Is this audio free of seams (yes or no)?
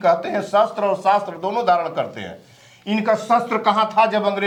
yes